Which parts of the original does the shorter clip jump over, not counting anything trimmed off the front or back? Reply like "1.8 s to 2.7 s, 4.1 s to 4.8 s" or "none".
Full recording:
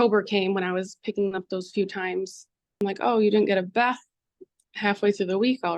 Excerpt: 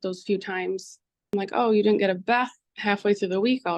4.1 s to 4.6 s